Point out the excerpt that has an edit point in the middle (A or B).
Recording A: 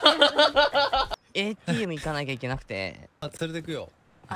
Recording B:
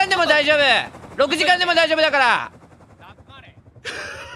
A